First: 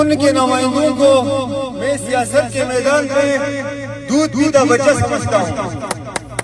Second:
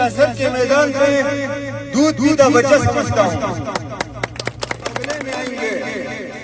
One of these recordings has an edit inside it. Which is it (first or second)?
second